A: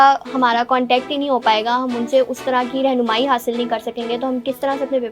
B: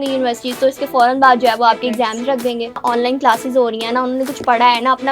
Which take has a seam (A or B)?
B